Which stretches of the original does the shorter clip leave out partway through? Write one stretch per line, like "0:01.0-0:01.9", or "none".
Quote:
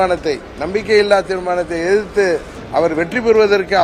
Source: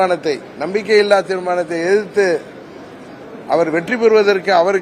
0:02.6-0:03.3